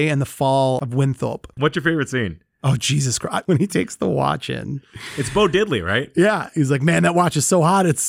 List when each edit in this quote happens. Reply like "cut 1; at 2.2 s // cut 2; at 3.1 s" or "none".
cut 1; at 1.5 s // cut 2; at 3.4 s // cut 3; at 6.5 s